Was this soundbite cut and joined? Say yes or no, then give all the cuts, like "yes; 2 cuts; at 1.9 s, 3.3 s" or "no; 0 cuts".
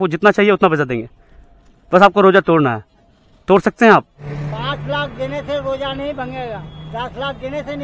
yes; 2 cuts; at 4.3 s, 6.9 s